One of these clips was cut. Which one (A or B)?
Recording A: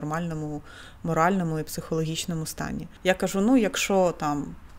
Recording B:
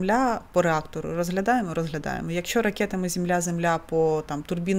A